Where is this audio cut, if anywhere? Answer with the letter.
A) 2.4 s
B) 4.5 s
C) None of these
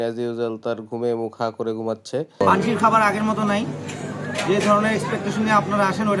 A